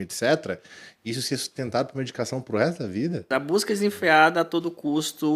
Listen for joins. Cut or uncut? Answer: cut